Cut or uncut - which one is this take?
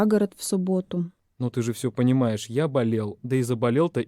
cut